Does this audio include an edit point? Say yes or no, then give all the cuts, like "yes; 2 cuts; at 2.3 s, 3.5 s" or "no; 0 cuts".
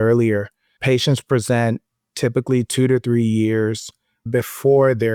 no; 0 cuts